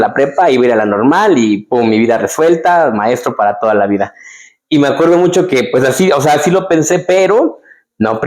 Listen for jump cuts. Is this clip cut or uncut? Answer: uncut